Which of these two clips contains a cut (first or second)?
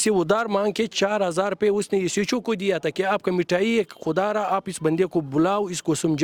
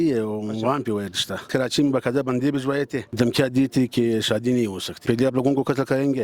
second